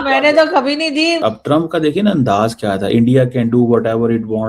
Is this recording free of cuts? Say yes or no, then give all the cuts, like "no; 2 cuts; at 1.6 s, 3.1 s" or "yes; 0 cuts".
no; 1 cut; at 1.2 s